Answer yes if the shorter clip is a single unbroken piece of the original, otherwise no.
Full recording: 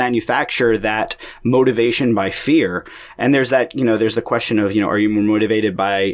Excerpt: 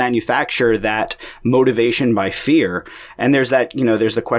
yes